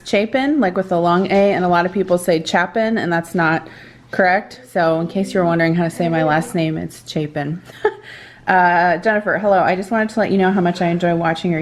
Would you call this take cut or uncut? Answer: uncut